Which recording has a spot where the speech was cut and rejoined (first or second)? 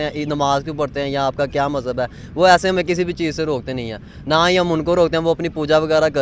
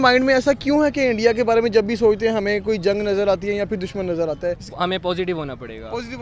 second